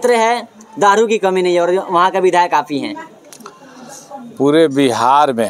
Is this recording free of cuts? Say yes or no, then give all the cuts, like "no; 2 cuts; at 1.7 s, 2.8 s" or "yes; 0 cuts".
yes; 0 cuts